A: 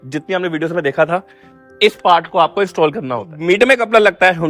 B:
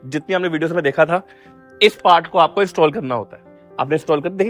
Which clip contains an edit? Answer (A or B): A